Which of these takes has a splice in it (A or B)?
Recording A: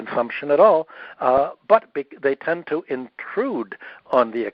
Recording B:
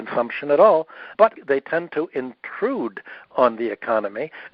B